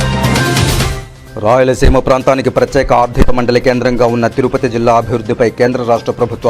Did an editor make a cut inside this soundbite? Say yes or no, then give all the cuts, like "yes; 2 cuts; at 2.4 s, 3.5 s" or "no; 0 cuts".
yes; 1 cut; at 1.0 s